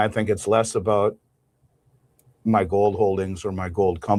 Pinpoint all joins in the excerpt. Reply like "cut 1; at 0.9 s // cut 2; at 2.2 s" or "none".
none